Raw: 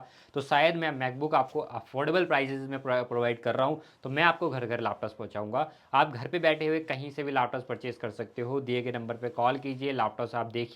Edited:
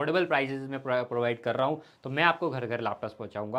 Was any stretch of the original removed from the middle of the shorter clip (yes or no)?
no